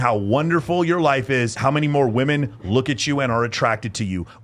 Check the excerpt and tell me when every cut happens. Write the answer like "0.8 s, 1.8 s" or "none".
1.6 s